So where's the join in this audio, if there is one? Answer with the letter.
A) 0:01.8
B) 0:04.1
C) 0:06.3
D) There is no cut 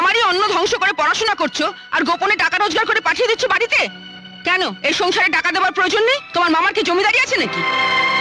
D